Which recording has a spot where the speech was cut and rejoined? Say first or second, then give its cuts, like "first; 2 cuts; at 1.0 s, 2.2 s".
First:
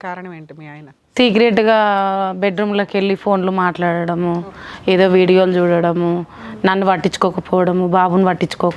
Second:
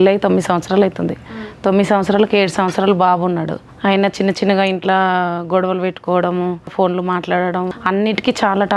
second; 3 cuts; at 3.6 s, 6.7 s, 7.7 s